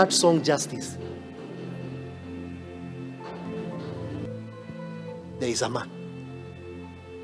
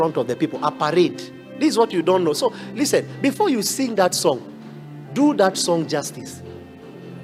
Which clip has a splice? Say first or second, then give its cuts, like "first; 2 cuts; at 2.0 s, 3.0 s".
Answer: first; 1 cut; at 4.2 s